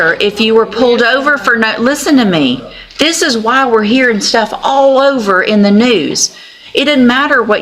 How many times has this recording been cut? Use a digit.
0